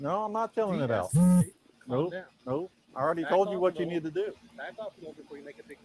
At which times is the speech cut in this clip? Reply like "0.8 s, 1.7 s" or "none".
2.7 s